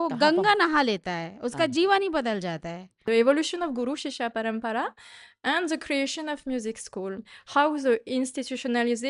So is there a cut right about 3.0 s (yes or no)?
yes